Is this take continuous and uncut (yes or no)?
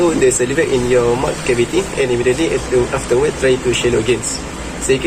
yes